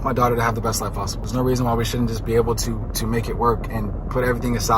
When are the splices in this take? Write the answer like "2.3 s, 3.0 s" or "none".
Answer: 1.2 s